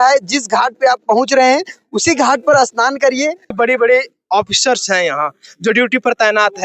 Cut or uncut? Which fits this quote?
cut